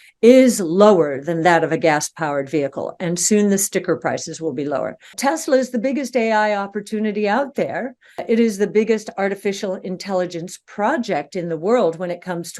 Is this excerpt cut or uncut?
cut